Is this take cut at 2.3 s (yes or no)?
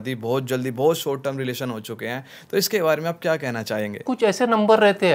no